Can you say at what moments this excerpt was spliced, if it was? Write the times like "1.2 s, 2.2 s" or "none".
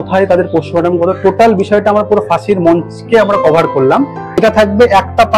4.3 s